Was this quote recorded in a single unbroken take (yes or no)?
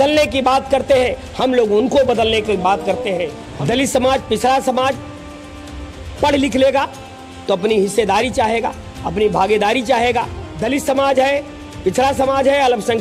no